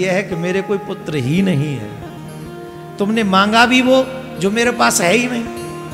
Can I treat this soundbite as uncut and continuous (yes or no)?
yes